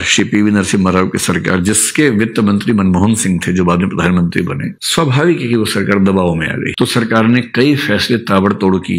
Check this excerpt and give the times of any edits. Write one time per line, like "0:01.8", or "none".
0:06.7